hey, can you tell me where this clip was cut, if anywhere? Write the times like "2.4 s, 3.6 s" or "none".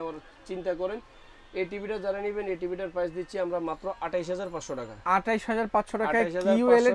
none